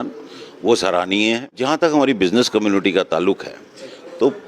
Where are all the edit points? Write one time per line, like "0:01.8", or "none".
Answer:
0:01.5